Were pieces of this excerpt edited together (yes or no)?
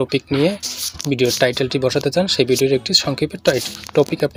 no